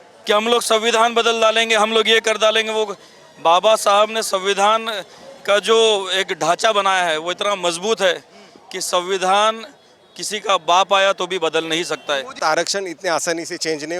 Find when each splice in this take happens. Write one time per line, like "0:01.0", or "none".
0:12.4